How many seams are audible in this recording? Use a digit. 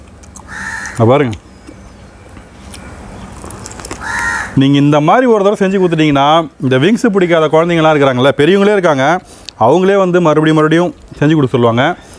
1